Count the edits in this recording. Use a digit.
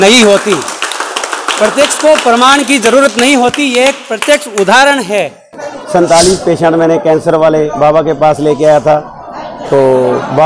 1